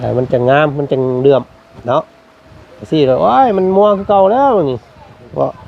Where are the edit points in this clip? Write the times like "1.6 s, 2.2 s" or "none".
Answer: none